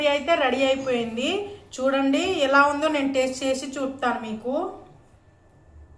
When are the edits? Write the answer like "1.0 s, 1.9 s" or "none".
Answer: none